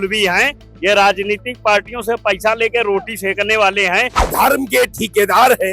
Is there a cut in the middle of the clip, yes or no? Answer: yes